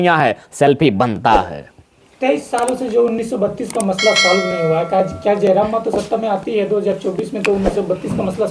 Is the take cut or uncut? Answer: uncut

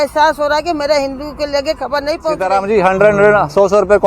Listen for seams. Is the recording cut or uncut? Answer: cut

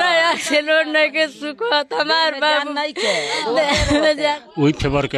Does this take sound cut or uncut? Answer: uncut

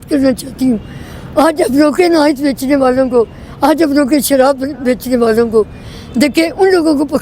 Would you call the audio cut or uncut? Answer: uncut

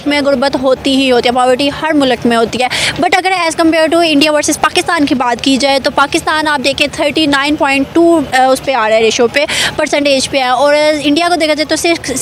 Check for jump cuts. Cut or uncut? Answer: uncut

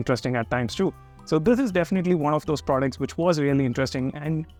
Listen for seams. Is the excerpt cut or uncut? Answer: uncut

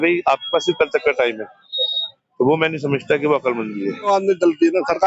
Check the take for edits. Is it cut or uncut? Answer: cut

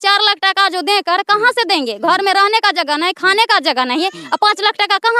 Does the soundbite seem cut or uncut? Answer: uncut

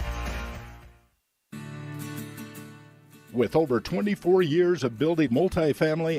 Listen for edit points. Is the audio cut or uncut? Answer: uncut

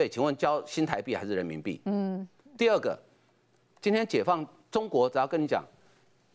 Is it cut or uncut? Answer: uncut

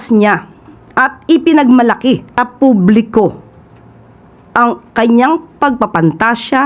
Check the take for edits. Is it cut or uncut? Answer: cut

